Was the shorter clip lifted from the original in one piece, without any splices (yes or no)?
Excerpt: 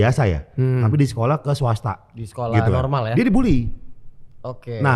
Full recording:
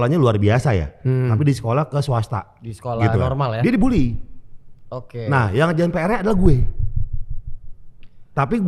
yes